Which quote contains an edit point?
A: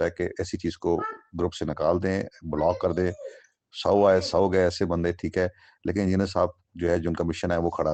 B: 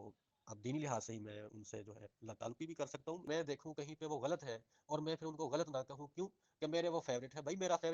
B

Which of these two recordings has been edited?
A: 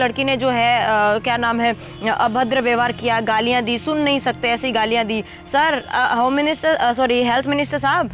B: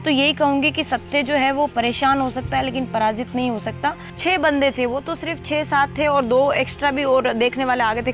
B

